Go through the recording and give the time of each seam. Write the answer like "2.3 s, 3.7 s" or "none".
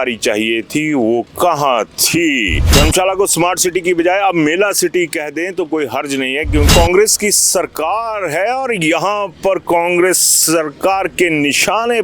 2.7 s, 6.7 s